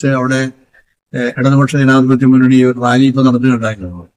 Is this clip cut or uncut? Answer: uncut